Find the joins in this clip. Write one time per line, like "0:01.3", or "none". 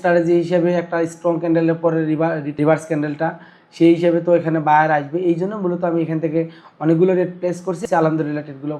0:02.5
0:07.8